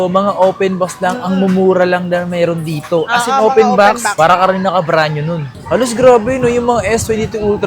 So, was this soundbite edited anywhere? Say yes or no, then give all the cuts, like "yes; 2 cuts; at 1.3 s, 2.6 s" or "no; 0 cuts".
yes; 1 cut; at 5.5 s